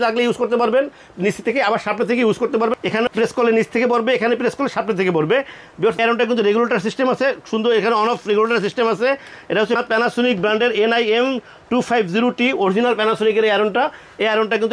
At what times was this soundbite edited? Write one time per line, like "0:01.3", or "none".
none

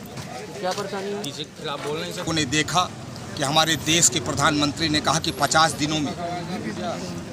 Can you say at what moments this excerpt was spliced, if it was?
0:02.3

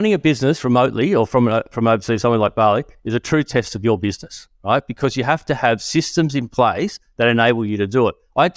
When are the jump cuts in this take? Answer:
none

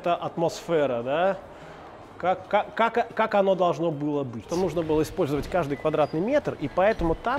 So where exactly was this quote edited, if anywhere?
0:04.5

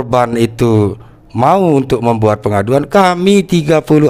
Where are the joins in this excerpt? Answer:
none

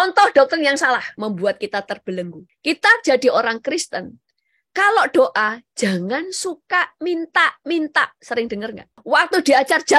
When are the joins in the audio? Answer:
0:01.1
0:02.4
0:08.9

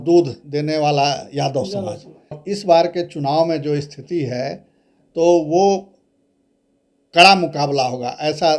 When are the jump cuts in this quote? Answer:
0:02.4

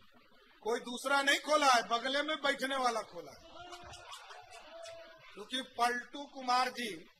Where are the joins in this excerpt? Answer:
none

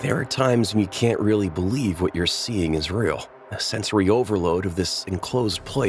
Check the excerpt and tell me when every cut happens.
none

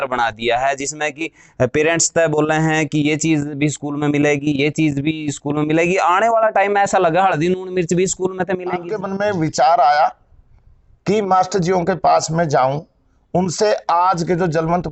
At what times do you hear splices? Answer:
0:09.0

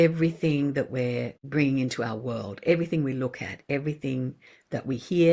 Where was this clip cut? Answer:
0:01.4

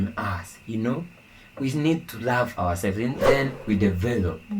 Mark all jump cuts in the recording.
0:03.2

